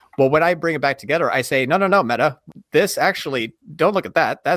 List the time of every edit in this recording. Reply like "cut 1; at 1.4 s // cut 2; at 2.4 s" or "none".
cut 1; at 2.5 s